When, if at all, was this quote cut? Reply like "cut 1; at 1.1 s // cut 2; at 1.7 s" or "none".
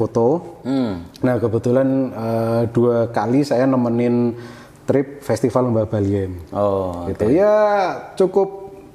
none